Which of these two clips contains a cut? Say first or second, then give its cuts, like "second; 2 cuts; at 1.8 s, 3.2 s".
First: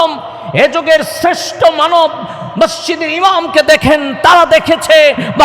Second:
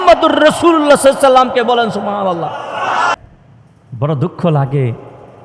second; 1 cut; at 3.1 s